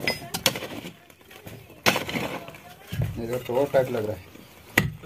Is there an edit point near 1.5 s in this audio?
no; 1 cut; at 3.2 s

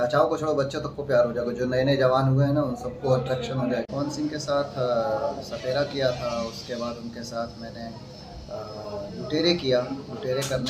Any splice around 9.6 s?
no; 1 cut; at 3.9 s

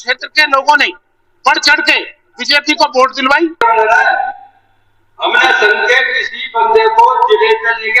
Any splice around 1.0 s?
no; 1 cut; at 3.6 s

